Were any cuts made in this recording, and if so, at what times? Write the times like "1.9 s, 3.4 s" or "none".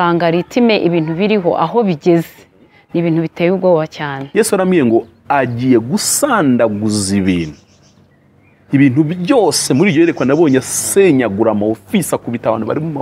4.2 s